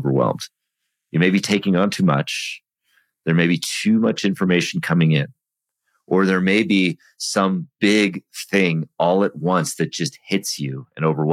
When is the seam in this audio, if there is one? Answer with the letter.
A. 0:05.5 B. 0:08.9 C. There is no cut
C